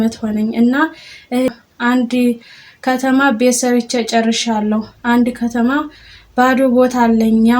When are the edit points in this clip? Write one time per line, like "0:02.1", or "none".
0:01.5